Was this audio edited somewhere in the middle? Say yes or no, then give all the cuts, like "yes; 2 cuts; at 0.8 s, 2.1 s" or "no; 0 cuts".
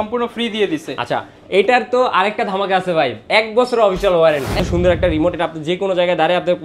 yes; 1 cut; at 4.6 s